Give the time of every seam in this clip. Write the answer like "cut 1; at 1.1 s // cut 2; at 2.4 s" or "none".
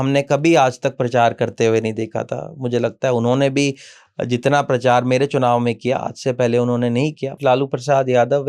cut 1; at 7.4 s